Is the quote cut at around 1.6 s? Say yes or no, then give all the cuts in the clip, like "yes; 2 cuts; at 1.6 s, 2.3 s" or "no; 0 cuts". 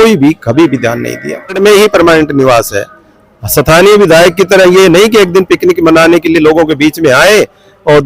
yes; 1 cut; at 1.6 s